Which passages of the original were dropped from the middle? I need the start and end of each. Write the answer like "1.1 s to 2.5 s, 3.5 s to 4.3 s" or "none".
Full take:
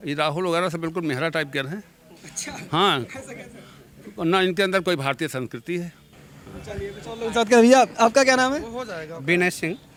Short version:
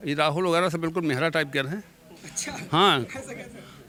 none